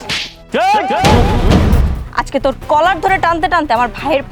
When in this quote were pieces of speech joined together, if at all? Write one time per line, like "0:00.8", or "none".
0:02.0